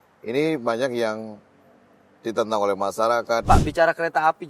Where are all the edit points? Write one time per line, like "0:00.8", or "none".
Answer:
0:03.4